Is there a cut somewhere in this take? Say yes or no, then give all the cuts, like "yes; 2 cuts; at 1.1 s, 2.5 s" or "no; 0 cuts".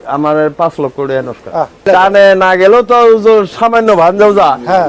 yes; 1 cut; at 1.9 s